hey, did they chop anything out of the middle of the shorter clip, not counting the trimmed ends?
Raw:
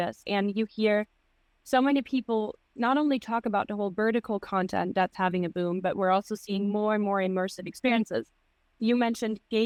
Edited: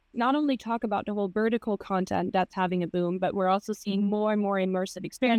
no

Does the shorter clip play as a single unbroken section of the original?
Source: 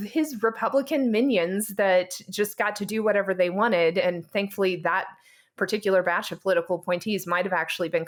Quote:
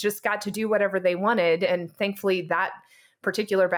yes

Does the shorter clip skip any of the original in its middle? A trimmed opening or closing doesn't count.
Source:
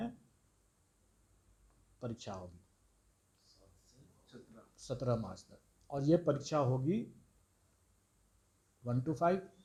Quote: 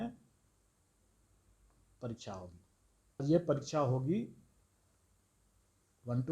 yes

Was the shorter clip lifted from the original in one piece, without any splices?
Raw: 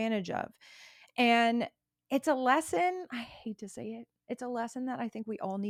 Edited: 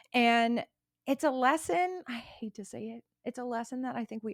yes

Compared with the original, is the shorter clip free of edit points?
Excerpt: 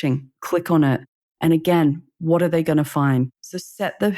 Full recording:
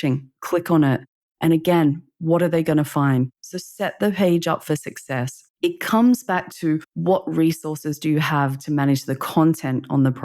yes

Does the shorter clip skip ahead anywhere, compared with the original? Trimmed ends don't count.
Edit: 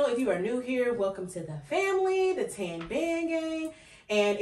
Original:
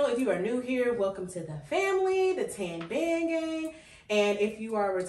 no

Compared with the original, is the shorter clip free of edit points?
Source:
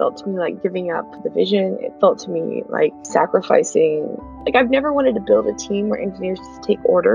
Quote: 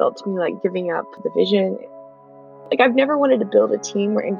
no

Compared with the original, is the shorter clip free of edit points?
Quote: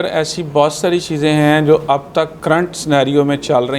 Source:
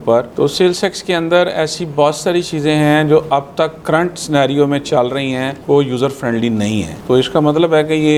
yes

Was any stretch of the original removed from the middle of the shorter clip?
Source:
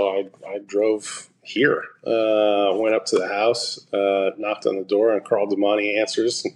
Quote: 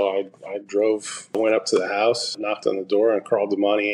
yes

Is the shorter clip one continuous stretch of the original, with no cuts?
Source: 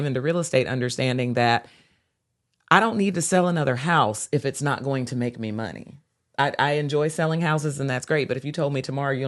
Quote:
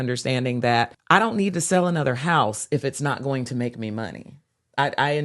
no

